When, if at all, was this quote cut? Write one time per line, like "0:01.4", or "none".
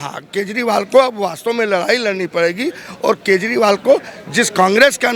none